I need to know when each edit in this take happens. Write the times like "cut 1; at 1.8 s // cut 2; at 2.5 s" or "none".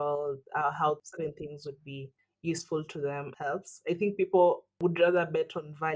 cut 1; at 1.1 s // cut 2; at 3.3 s // cut 3; at 4.8 s